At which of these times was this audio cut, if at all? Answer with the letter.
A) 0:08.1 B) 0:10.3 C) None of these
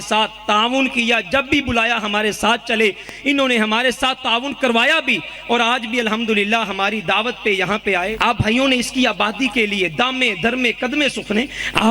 A